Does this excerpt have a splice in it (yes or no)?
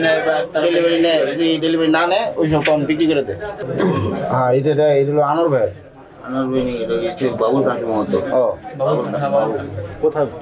no